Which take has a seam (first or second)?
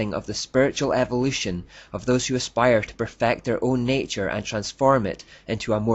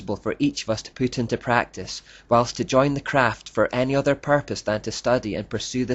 first